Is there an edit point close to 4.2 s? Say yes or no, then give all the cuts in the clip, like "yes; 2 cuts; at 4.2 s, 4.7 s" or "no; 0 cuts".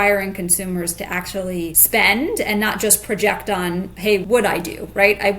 yes; 2 cuts; at 1.8 s, 4.2 s